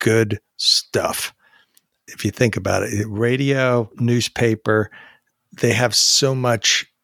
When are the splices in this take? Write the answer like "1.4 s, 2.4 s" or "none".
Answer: none